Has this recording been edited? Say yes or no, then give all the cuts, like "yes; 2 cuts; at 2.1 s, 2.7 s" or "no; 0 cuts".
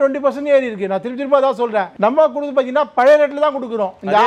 no; 0 cuts